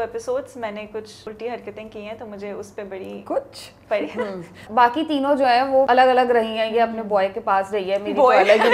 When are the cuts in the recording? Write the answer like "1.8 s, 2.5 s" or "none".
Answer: 1.2 s, 4.6 s, 5.9 s